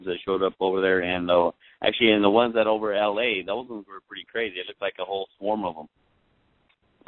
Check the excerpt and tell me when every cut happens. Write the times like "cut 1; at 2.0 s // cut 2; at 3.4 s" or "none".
cut 1; at 5.1 s